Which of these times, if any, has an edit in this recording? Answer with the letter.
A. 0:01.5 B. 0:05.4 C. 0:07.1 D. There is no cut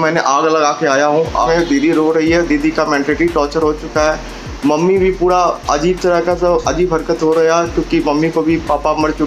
A